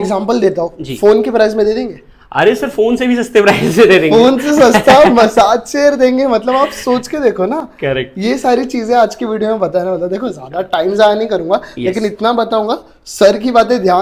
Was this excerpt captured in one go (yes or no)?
yes